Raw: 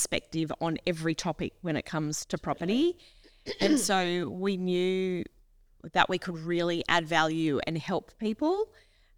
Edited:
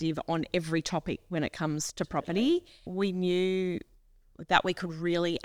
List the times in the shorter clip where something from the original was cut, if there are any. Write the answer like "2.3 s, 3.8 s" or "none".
2.9 s